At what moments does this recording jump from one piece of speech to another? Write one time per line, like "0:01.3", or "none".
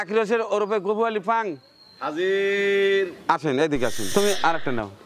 0:04.0